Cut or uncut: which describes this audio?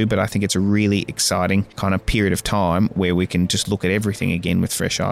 cut